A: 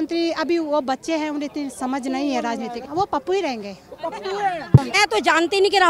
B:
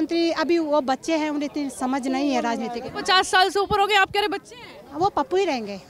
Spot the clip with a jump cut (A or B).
A